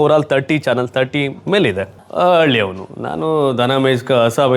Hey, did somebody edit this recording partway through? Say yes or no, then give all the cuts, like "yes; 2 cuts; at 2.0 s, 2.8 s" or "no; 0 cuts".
yes; 1 cut; at 2.1 s